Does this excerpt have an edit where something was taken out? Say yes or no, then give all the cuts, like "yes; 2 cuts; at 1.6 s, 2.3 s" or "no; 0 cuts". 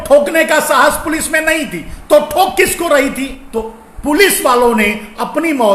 yes; 1 cut; at 3.4 s